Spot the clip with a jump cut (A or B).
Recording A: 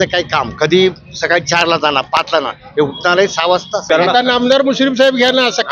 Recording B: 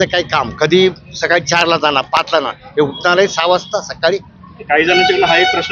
A